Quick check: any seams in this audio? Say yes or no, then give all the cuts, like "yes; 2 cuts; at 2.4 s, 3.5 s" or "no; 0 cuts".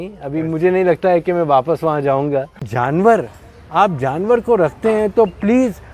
yes; 1 cut; at 2.7 s